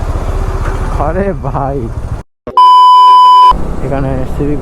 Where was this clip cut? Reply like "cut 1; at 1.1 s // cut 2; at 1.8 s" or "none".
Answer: cut 1; at 2.4 s // cut 2; at 3.6 s